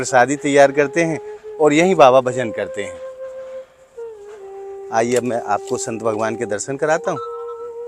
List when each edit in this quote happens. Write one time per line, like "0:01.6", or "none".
0:03.2
0:04.9

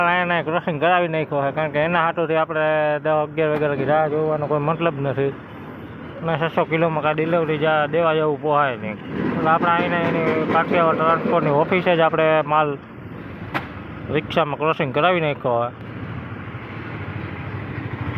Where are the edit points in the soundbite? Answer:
none

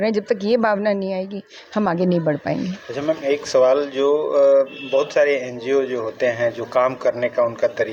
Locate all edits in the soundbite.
none

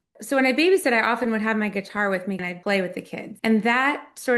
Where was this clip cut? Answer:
0:02.4
0:03.2

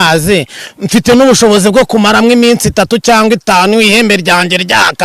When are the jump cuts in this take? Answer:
none

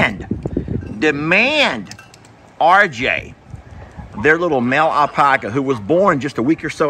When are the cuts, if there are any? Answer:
none

